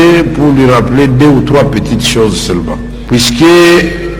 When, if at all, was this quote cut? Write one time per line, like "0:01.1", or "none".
0:02.9